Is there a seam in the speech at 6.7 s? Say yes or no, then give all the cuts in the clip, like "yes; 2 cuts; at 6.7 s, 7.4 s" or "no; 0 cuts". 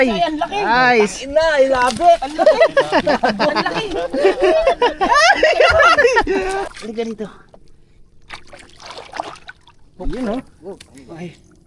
yes; 1 cut; at 6.7 s